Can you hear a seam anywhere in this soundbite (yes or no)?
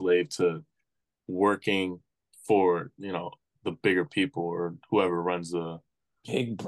no